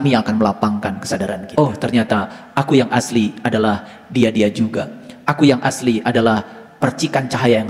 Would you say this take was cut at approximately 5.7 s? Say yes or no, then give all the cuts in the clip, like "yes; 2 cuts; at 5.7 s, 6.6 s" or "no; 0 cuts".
no; 1 cut; at 1.5 s